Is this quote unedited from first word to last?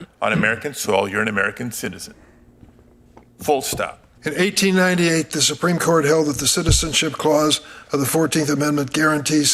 no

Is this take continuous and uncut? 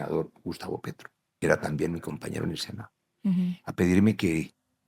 no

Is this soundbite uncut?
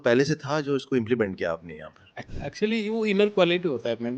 no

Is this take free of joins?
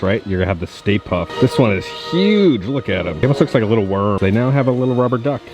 yes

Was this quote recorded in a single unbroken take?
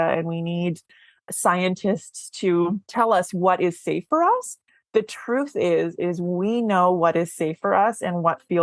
no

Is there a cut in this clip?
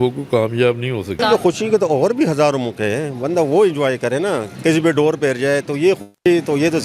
yes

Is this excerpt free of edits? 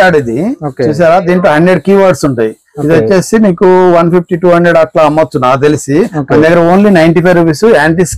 yes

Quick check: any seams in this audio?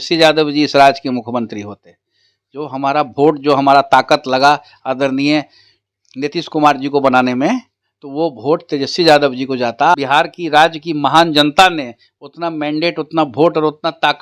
yes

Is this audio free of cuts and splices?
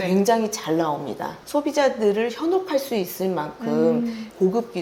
no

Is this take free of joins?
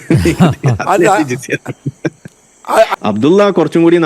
no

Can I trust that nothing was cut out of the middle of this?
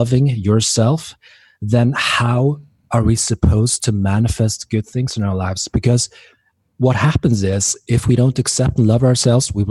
yes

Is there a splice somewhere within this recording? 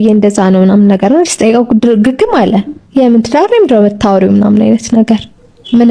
no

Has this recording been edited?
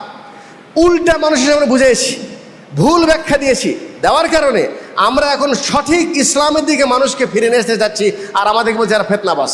no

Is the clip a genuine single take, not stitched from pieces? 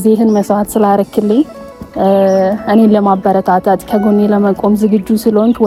yes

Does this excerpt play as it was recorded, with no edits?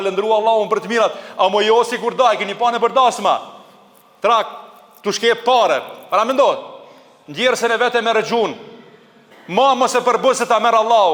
yes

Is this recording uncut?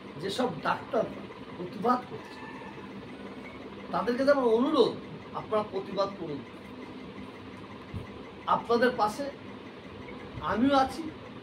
yes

